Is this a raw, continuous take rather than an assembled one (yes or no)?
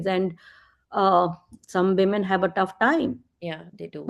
yes